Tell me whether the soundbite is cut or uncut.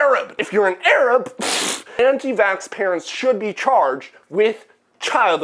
cut